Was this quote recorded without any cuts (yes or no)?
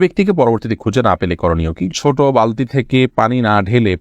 no